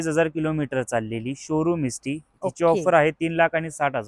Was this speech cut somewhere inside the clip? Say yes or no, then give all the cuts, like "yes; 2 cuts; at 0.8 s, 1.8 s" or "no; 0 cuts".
no; 0 cuts